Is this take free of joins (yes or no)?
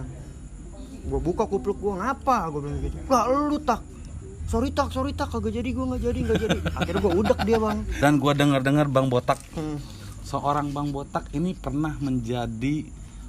no